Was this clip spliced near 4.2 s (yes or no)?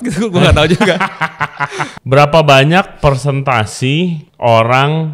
yes